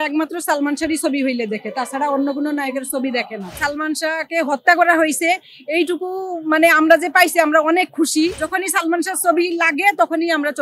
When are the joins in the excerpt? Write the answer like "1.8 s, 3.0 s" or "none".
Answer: 3.6 s, 8.4 s